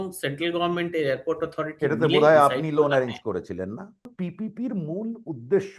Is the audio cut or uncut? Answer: cut